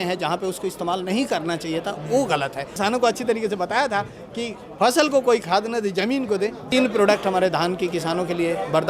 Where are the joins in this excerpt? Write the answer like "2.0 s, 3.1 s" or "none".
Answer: 2.7 s, 6.7 s

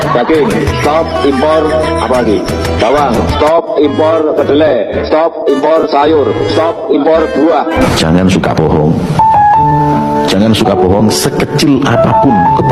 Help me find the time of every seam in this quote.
7.8 s

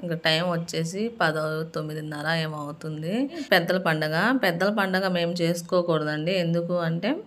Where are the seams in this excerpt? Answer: 3.4 s

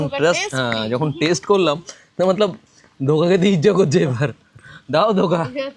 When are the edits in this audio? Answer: none

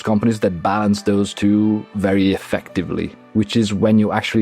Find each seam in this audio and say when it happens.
3.2 s

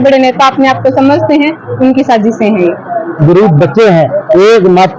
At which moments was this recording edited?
3.2 s

